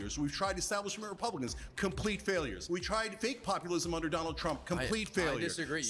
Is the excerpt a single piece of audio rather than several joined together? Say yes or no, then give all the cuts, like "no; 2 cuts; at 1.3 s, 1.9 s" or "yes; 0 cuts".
no; 1 cut; at 2.9 s